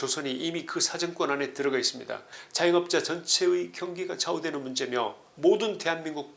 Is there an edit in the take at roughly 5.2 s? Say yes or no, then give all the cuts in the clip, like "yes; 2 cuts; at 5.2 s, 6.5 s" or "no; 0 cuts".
yes; 2 cuts; at 2.4 s, 5.2 s